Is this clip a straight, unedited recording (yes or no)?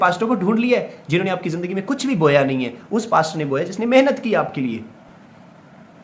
no